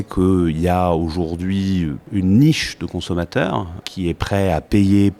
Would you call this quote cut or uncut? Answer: cut